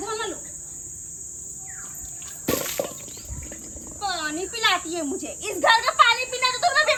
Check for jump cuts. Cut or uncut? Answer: uncut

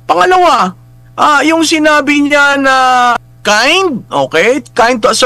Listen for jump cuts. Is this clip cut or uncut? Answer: cut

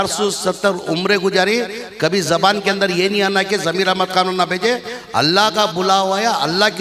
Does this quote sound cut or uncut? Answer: uncut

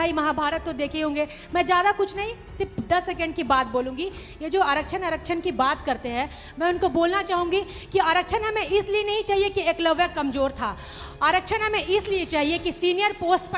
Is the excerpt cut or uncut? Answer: uncut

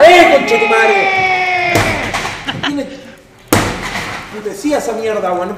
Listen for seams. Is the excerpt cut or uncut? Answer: uncut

